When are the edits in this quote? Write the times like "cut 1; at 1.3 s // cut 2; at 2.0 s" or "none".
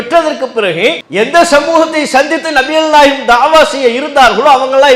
cut 1; at 1.0 s